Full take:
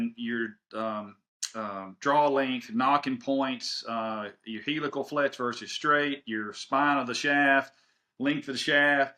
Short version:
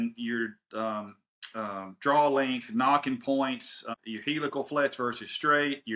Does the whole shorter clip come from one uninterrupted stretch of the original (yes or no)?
no